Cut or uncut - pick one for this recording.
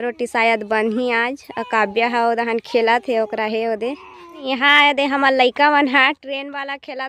uncut